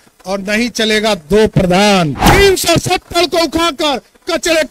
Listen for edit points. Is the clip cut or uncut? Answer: cut